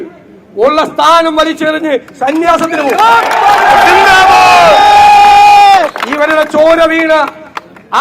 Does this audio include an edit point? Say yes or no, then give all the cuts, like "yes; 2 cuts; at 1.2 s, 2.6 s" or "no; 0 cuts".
no; 0 cuts